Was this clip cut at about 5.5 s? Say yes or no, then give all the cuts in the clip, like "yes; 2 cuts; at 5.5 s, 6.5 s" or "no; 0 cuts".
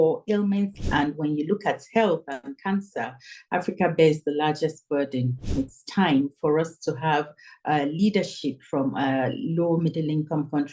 yes; 2 cuts; at 0.8 s, 5.5 s